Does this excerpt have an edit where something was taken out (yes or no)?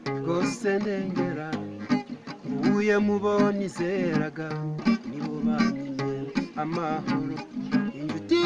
yes